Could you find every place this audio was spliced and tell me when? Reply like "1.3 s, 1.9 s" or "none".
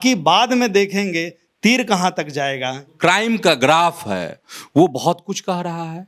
2.9 s